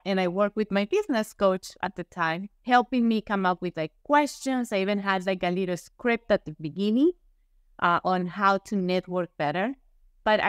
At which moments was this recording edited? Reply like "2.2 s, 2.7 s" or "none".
2.5 s